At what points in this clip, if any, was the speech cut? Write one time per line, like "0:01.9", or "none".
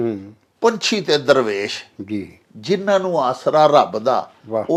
none